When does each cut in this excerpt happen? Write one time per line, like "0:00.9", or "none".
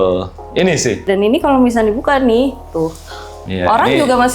0:01.0